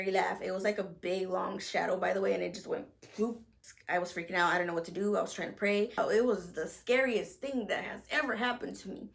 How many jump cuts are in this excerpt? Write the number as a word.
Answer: two